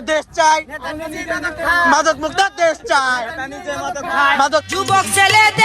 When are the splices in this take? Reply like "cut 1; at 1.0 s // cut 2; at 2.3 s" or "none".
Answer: cut 1; at 4.6 s